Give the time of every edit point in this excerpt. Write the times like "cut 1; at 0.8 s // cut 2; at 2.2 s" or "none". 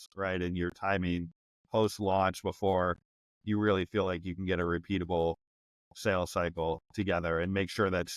none